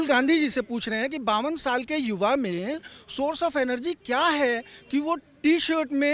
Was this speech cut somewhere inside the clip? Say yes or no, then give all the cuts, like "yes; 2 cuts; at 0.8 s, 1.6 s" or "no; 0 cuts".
no; 0 cuts